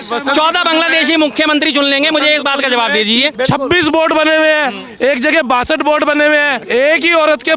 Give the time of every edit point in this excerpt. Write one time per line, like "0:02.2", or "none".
0:03.3
0:06.6